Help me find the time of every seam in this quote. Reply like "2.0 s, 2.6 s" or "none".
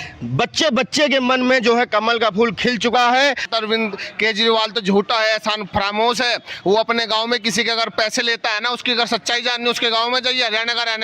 3.5 s

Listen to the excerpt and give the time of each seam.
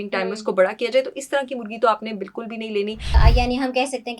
3.1 s

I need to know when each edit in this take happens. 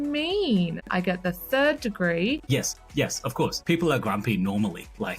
0.9 s, 2.4 s, 3.6 s

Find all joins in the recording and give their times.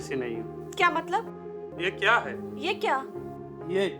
1.7 s

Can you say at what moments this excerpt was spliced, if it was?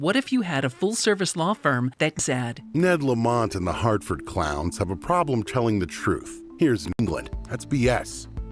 2.2 s, 7.0 s

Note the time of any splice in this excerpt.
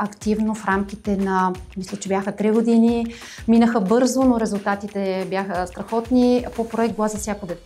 none

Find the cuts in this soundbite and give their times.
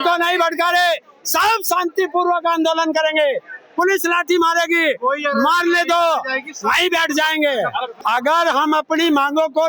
8.0 s

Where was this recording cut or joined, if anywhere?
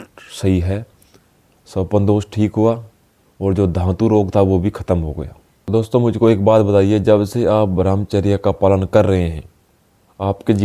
none

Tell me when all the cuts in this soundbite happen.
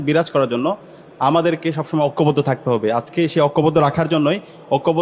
none

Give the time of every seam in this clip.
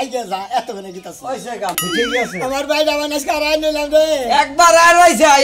1.7 s

